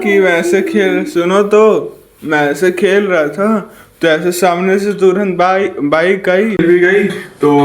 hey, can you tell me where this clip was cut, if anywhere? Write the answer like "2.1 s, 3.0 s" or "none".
6.6 s